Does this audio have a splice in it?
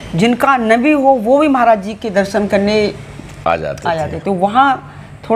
no; 0 cuts

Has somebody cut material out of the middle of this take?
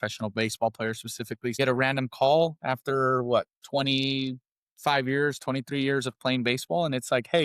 yes; 1 cut; at 1.6 s

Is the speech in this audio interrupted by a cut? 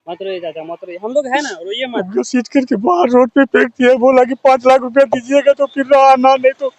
no; 0 cuts

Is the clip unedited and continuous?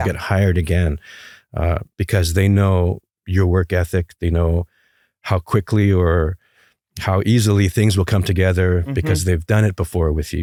yes; 0 cuts

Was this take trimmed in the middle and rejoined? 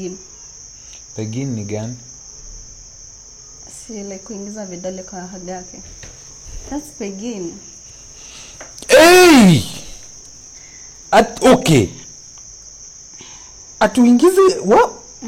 no; 0 cuts

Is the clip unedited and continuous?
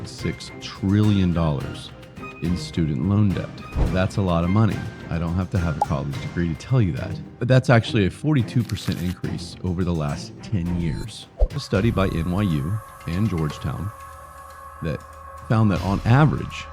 no; 1 cut; at 11.6 s

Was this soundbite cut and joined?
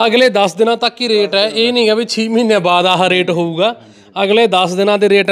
no; 0 cuts

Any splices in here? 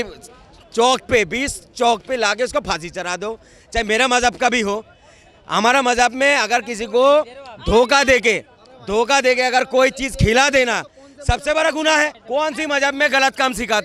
no; 0 cuts

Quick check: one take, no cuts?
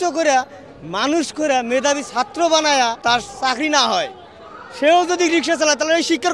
no; 1 cut; at 3.0 s

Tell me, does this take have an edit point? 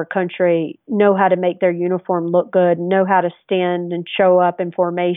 no; 0 cuts

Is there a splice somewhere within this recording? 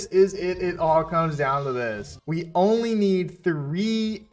yes; 1 cut; at 2.1 s

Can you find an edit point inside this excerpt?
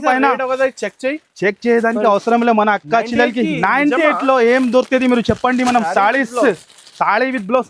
no; 0 cuts

